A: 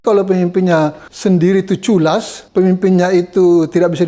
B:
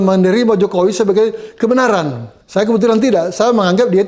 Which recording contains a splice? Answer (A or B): A